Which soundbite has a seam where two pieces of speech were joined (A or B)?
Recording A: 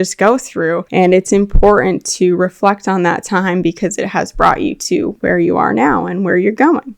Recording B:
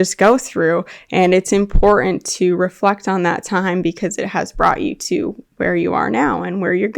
A